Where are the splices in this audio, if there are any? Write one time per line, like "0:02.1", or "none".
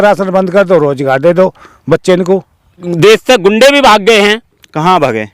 0:02.9

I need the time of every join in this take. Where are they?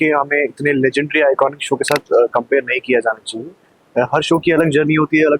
none

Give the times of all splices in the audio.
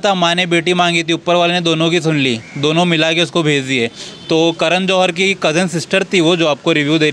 none

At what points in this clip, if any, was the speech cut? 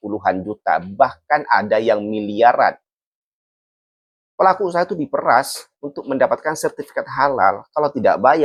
none

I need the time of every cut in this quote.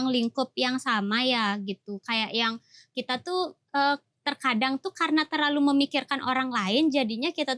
none

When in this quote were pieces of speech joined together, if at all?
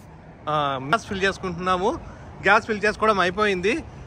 0:00.9

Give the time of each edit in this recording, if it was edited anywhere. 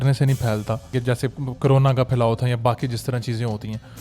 0:00.9

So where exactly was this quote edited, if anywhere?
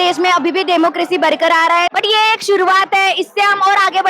0:01.9

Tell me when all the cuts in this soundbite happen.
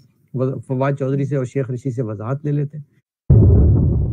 0:03.1

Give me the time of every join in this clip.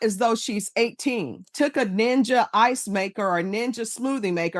0:01.5

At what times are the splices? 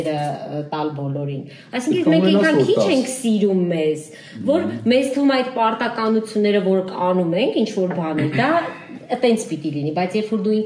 none

